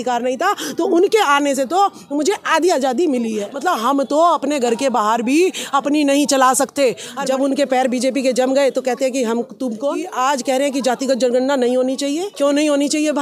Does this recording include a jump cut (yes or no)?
yes